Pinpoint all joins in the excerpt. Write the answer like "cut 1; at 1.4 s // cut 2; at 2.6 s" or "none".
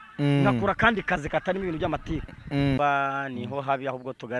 cut 1; at 2.8 s